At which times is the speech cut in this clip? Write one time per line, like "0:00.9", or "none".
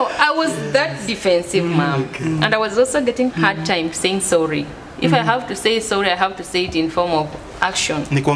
0:03.3